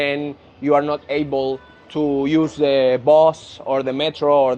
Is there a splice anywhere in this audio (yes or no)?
no